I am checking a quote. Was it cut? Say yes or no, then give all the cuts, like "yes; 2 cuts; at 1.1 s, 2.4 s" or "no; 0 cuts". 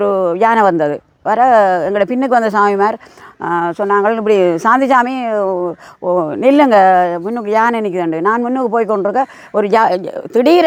no; 0 cuts